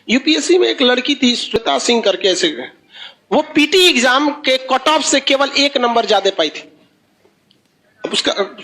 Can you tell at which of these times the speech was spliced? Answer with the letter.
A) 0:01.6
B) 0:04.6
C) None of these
A